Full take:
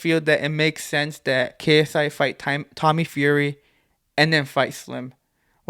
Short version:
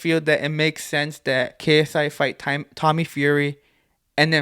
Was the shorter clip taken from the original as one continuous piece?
yes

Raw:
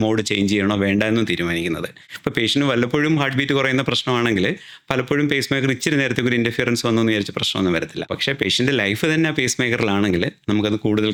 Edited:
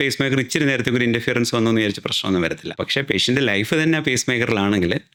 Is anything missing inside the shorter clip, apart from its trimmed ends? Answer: no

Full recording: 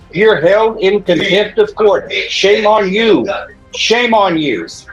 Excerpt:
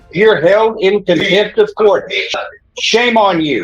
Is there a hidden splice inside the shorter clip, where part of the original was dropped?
yes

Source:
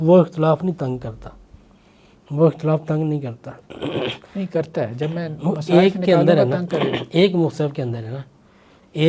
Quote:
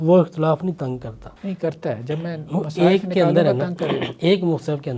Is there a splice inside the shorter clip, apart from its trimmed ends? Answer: yes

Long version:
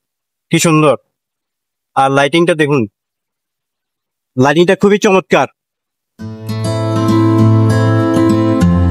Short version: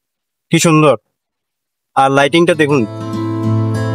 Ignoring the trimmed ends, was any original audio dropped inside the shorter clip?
yes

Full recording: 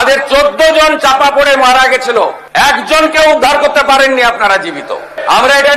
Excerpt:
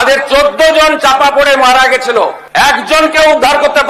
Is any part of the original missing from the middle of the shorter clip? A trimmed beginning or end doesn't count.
no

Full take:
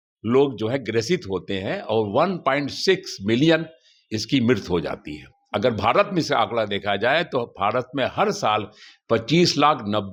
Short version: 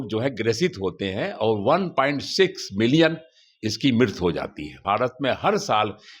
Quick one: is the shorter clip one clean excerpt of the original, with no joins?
no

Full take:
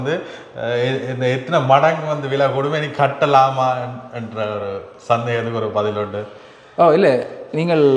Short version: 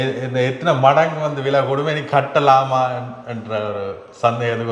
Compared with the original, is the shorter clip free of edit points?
yes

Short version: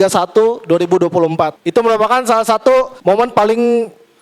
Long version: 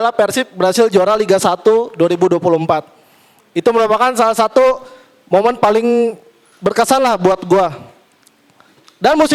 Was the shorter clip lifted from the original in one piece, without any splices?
no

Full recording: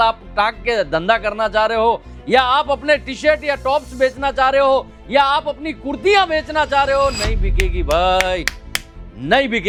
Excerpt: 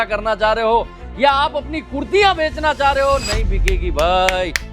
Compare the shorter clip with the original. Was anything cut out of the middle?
yes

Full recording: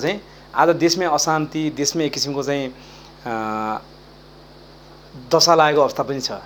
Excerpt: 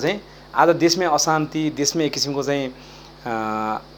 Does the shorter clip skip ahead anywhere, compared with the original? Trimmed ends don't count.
no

